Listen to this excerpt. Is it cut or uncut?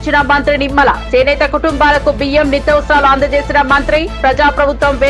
uncut